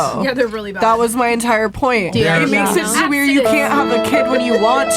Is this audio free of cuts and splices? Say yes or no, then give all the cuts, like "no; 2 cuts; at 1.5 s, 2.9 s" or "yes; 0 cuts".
yes; 0 cuts